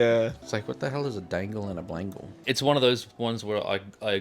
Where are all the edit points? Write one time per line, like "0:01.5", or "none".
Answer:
0:02.3